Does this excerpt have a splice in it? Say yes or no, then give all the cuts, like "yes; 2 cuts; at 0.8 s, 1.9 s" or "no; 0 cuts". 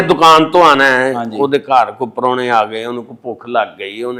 no; 0 cuts